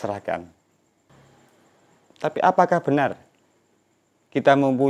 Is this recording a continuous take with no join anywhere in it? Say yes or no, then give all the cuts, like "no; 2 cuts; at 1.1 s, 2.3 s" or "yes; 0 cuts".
no; 1 cut; at 1.1 s